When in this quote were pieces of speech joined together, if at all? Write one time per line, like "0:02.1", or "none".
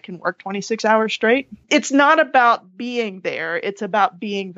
0:01.7